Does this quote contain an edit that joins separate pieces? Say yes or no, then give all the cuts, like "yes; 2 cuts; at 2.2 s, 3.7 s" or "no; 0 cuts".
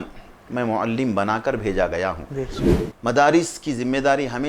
yes; 1 cut; at 2.6 s